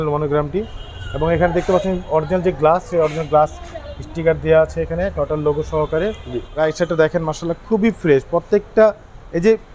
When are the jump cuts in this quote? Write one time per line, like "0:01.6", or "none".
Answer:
0:06.5